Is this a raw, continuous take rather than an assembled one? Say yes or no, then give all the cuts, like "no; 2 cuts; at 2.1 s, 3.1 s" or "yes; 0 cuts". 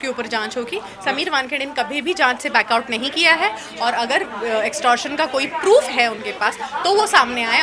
yes; 0 cuts